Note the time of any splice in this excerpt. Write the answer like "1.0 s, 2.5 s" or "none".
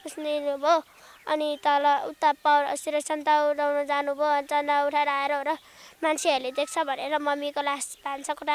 none